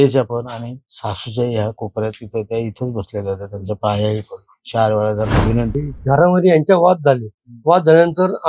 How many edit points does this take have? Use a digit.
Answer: 1